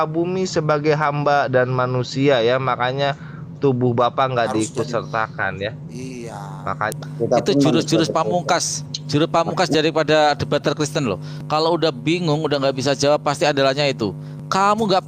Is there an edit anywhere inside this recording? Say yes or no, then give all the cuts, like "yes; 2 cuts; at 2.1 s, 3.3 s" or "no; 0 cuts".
yes; 1 cut; at 6.9 s